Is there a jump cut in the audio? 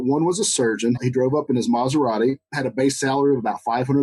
yes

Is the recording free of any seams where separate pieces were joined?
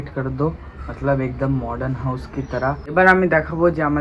no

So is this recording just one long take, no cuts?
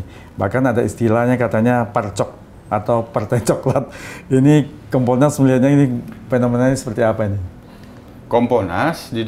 yes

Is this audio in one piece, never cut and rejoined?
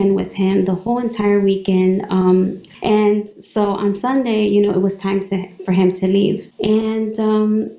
no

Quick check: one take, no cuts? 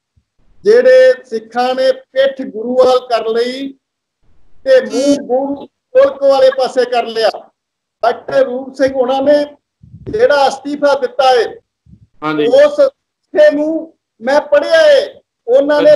no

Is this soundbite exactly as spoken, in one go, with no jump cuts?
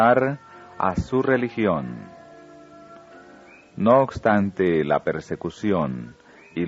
yes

